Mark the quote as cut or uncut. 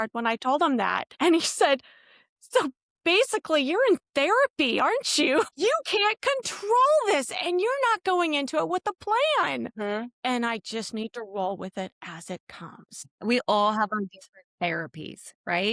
cut